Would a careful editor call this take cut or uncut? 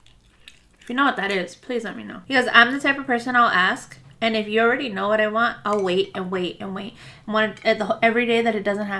cut